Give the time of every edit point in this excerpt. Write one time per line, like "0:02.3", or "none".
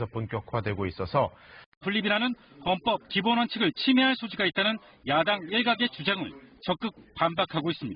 none